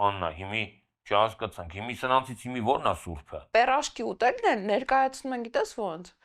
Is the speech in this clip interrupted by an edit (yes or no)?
yes